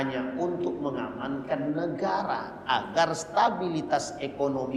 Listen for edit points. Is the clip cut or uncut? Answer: uncut